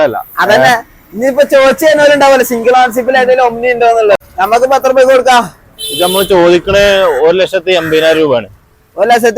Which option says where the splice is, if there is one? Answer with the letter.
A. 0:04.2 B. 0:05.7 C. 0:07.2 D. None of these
A